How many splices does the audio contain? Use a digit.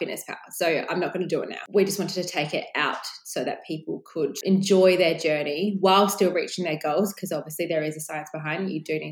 2